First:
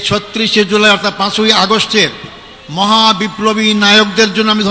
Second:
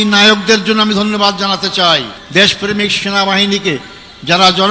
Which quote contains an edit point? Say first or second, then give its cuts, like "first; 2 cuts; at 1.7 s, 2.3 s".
second; 1 cut; at 2.2 s